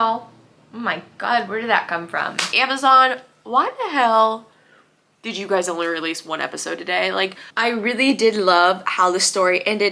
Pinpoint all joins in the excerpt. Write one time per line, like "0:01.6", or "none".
0:02.5
0:07.4